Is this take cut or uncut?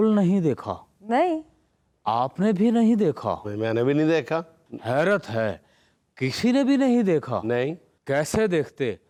uncut